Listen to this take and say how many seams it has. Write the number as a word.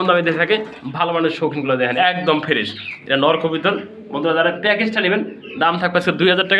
one